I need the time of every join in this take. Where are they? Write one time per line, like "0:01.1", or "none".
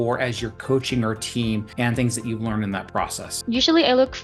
0:01.9
0:03.3